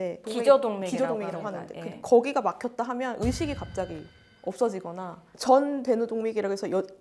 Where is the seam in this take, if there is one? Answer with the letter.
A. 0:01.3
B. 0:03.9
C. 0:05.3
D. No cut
C